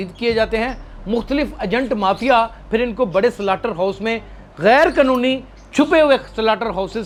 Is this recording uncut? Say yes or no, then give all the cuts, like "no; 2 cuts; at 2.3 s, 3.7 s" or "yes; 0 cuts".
yes; 0 cuts